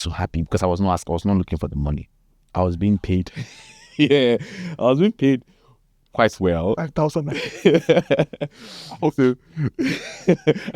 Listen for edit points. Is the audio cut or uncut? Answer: uncut